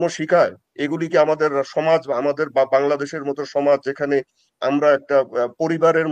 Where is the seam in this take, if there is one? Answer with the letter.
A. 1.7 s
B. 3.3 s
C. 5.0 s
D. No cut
D